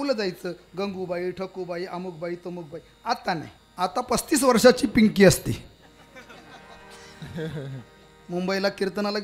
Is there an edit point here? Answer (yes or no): yes